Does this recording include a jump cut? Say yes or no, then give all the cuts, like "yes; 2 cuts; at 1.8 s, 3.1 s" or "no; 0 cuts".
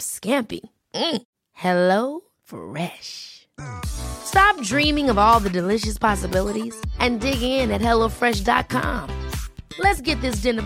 no; 0 cuts